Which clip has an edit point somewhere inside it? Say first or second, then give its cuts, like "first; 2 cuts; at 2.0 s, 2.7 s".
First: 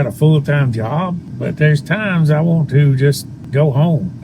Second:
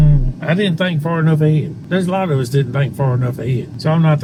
first; 1 cut; at 1.3 s